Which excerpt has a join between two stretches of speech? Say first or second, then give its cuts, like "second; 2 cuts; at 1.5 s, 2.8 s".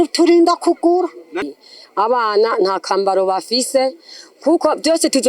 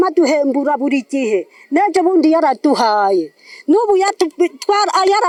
first; 1 cut; at 1.5 s